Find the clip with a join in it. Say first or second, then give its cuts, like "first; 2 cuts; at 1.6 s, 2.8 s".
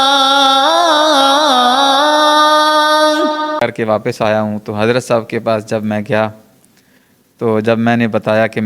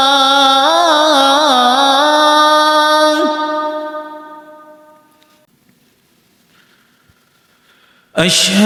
first; 1 cut; at 3.6 s